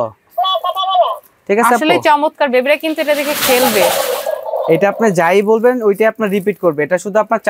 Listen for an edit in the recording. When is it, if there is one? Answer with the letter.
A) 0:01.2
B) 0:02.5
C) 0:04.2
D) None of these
D